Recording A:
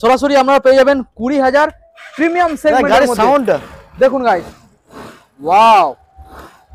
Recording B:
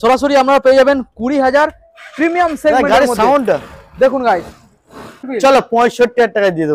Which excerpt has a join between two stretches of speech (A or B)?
B